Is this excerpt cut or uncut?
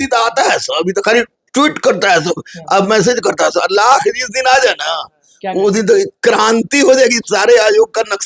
uncut